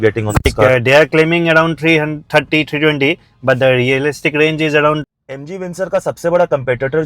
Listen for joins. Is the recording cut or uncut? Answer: cut